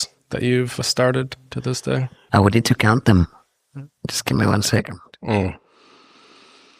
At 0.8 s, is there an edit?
yes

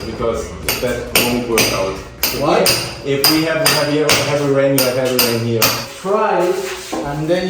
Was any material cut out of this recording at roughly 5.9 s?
yes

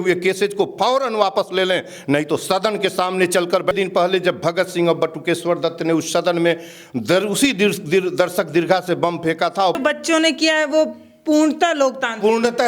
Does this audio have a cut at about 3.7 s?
yes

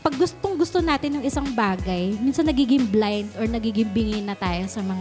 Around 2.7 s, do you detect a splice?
no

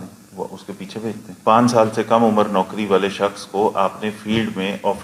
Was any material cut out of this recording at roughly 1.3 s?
yes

